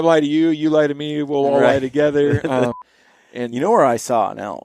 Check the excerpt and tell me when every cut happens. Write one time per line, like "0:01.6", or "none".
0:02.7